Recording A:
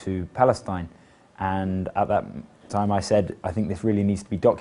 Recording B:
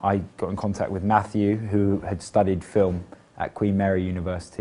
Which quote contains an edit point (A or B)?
A